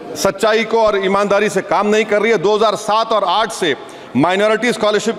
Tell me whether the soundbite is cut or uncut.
uncut